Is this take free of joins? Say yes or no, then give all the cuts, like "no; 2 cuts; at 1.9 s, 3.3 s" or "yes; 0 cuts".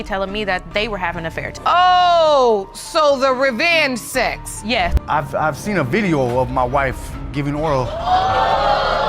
no; 2 cuts; at 1.5 s, 5.0 s